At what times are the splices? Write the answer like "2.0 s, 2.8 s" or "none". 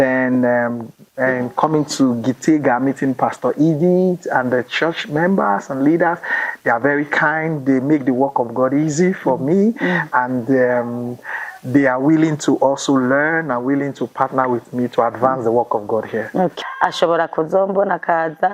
16.5 s